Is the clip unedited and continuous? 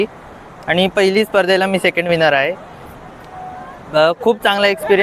yes; 0 cuts

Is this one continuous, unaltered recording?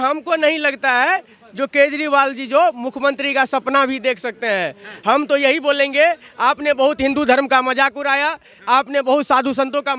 yes; 0 cuts

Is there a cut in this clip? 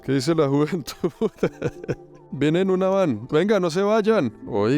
yes; 1 cut; at 2.2 s

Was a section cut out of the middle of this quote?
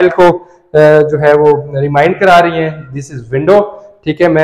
no; 0 cuts

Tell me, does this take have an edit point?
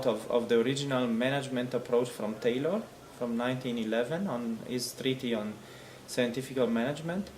yes; 1 cut; at 5.0 s

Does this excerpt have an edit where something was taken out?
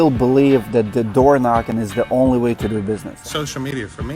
yes; 1 cut; at 3.1 s

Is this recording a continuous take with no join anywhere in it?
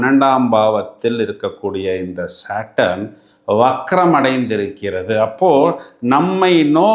yes; 0 cuts

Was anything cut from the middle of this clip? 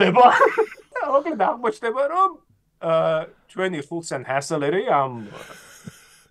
yes; 1 cut; at 0.9 s

